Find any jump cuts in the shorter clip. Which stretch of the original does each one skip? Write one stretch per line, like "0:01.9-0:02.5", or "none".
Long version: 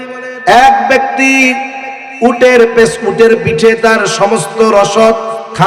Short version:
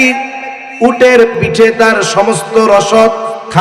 0:02.8-0:03.4